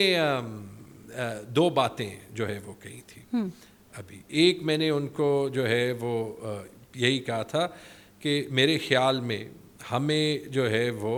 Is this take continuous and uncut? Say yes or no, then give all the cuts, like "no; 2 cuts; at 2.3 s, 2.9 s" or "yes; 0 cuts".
yes; 0 cuts